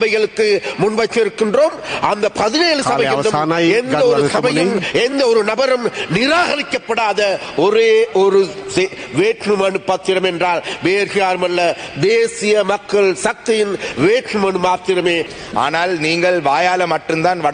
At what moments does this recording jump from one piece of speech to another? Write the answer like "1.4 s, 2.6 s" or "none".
15.3 s